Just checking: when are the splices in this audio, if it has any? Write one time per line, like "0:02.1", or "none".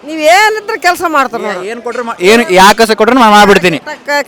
none